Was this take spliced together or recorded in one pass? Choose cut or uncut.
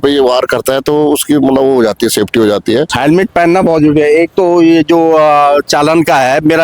cut